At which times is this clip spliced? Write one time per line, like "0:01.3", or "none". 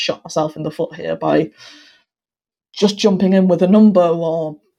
none